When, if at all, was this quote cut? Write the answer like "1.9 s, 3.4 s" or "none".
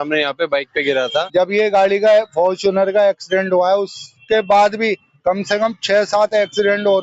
1.3 s